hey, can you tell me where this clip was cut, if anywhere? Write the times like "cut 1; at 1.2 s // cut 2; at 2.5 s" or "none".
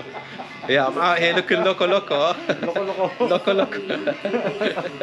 none